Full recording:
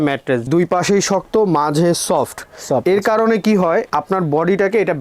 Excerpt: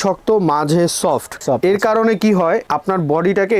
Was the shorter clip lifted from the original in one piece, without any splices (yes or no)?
no